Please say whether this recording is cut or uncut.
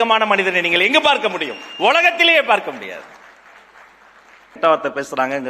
cut